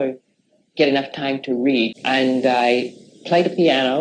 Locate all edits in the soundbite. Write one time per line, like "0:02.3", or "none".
0:01.9